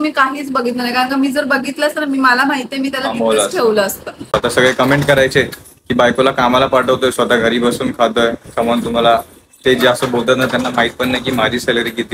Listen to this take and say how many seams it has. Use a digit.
1